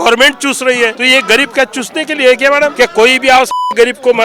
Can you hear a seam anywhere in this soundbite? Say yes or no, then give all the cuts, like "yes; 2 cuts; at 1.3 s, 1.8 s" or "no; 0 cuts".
yes; 2 cuts; at 1.0 s, 2.7 s